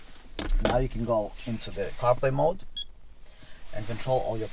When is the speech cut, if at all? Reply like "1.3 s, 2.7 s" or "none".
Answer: none